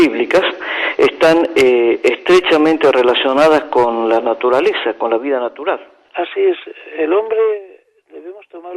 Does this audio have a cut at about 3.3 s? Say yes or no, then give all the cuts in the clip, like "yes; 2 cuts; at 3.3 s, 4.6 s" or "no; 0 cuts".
yes; 1 cut; at 3.3 s